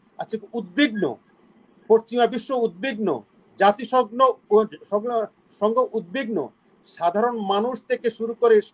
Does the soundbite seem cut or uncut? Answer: uncut